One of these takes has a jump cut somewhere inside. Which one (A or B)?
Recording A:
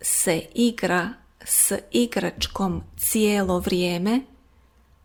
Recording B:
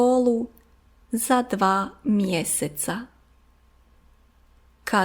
B